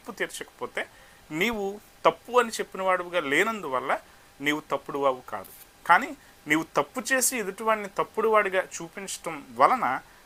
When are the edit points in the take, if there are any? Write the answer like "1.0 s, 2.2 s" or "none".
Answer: none